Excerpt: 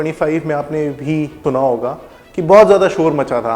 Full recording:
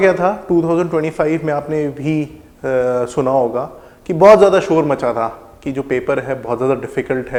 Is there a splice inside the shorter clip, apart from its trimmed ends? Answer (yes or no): yes